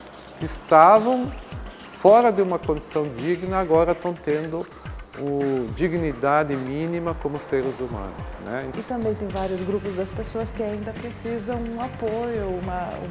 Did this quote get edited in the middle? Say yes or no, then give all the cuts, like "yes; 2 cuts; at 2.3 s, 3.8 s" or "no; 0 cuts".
yes; 1 cut; at 8.7 s